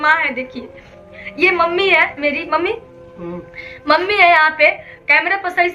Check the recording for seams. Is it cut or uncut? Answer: uncut